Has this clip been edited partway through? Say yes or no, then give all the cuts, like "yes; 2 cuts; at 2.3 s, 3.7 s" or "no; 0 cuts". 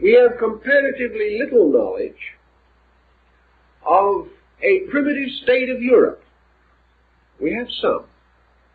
yes; 1 cut; at 4.4 s